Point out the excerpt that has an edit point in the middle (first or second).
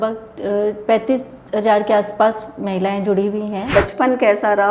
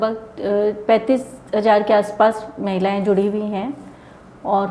first